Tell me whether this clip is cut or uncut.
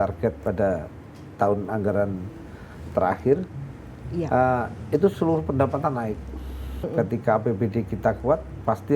cut